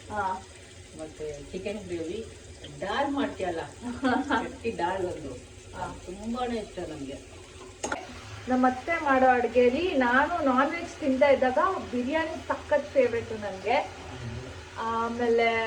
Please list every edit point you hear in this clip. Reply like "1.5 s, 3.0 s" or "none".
8.0 s